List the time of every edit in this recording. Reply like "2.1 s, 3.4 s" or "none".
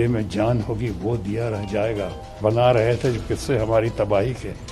2.4 s